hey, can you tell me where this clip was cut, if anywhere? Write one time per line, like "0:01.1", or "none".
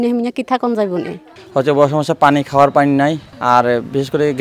0:01.3
0:03.3